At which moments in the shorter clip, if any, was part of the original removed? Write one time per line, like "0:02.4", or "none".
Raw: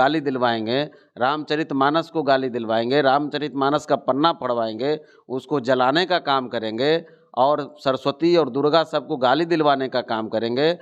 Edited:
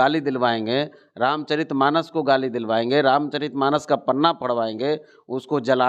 none